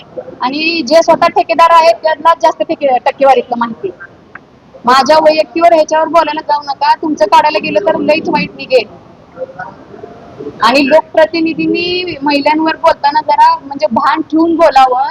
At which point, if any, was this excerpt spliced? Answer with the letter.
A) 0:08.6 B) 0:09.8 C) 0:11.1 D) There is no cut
D